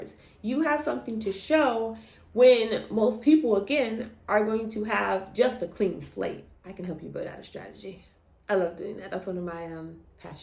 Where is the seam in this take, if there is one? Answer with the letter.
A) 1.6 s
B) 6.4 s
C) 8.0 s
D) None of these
B